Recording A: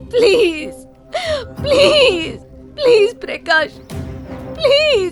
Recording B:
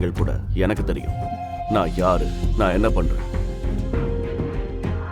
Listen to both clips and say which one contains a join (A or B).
B